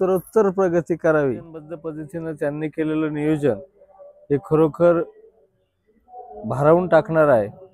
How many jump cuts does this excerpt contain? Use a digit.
1